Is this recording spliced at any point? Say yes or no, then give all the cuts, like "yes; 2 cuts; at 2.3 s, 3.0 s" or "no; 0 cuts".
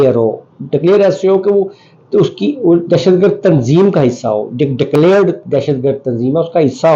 no; 0 cuts